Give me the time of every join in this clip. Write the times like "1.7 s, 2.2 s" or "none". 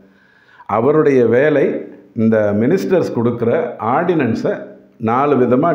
none